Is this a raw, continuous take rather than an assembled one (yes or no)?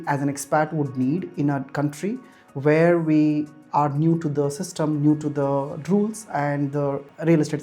yes